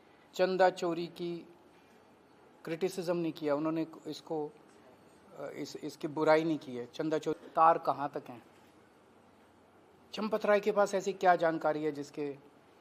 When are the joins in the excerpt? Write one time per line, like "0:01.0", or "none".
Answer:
0:07.4